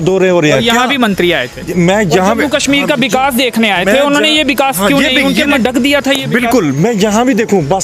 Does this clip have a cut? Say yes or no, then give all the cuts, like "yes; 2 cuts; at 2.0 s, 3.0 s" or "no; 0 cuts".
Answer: yes; 1 cut; at 5.6 s